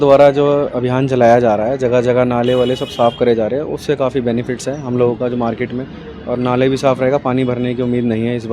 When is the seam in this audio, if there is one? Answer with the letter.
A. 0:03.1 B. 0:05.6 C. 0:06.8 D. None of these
D